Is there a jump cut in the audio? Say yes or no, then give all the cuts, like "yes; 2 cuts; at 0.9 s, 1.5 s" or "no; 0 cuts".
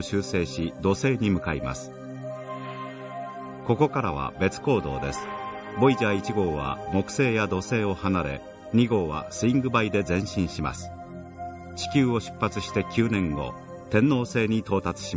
yes; 1 cut; at 6.5 s